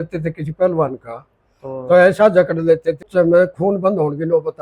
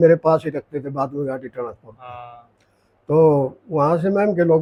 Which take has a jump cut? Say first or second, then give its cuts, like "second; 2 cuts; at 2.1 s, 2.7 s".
first; 1 cut; at 3.1 s